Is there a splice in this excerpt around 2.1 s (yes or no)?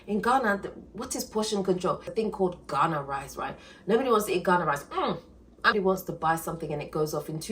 yes